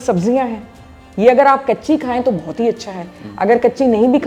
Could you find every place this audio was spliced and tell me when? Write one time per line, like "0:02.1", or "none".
none